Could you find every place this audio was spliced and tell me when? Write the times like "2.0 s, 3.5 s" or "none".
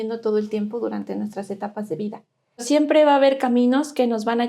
2.6 s